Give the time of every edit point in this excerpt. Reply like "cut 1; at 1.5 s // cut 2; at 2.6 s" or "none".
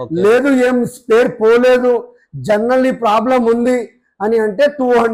none